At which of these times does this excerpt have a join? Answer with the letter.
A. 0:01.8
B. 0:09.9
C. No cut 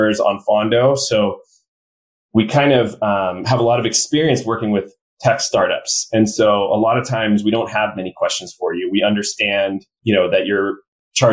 B